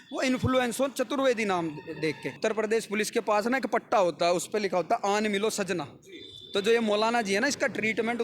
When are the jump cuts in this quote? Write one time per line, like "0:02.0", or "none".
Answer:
0:02.3